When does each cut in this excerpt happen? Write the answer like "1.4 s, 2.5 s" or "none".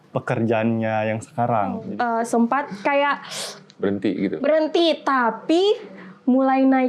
1.8 s

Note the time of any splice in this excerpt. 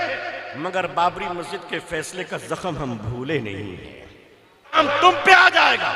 4.8 s

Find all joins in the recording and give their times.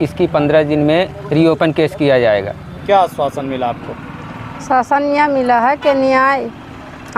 2.8 s

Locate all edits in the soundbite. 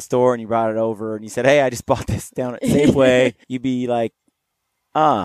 3.5 s

